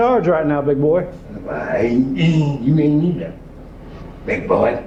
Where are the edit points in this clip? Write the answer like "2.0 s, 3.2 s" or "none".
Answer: none